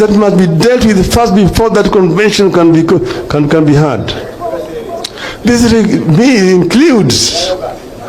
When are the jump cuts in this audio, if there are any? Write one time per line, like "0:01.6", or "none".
none